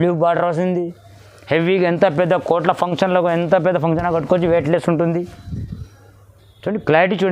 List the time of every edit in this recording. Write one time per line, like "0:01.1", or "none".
none